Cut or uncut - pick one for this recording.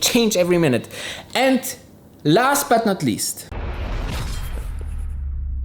uncut